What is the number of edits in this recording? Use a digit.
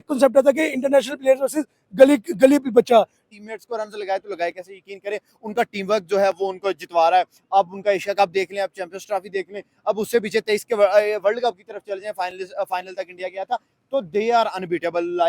1